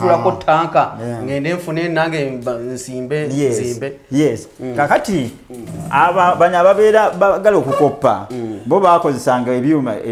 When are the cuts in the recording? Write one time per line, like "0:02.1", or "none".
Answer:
none